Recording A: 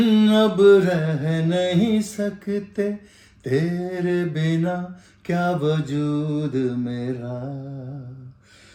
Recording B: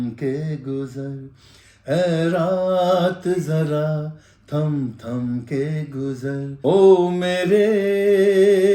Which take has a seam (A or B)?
B